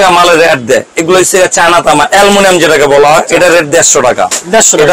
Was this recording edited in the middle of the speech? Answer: yes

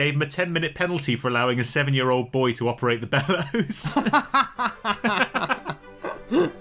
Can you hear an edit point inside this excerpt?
no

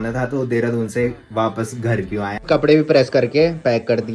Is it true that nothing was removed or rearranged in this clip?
no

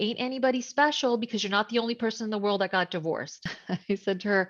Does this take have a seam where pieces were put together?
yes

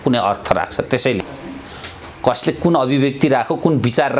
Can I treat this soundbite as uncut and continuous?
no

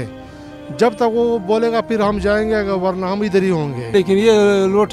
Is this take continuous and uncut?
no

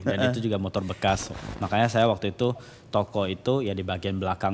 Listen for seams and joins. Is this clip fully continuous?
no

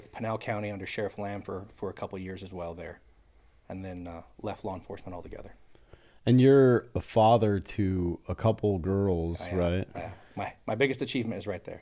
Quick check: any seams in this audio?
no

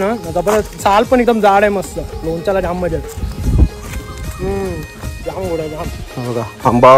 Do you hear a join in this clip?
yes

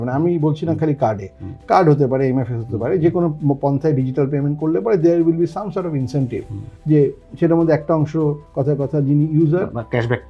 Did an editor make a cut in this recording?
no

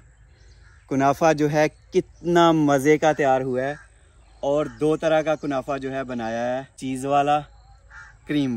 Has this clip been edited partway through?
yes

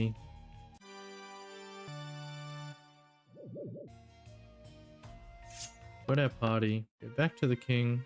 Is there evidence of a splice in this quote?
yes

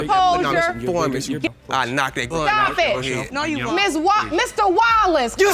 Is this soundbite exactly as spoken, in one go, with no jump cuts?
yes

